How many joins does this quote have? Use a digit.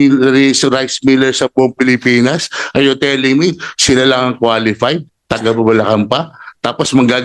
0